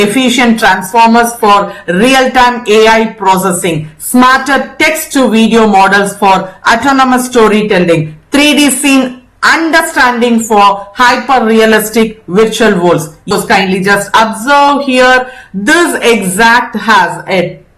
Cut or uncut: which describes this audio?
cut